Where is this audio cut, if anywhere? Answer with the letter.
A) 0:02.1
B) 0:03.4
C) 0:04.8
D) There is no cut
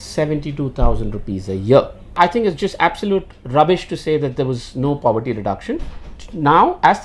A